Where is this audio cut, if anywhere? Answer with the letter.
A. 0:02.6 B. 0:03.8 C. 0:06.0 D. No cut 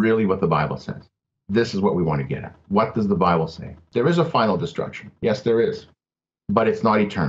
B